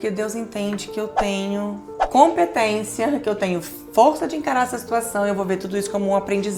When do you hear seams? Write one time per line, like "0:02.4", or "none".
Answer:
none